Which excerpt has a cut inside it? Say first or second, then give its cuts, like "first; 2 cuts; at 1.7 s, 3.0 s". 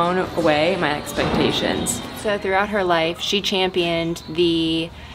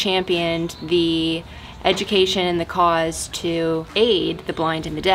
first; 1 cut; at 2.0 s